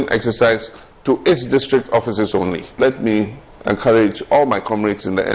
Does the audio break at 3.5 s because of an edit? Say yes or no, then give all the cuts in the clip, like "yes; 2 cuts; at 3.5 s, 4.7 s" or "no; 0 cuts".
yes; 2 cuts; at 2.8 s, 3.5 s